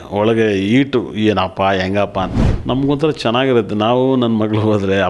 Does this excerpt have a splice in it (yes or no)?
yes